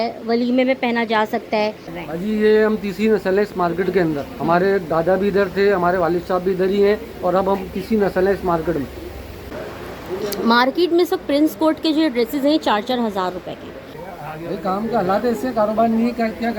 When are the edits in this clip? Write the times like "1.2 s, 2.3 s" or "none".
1.9 s, 9.5 s, 14.1 s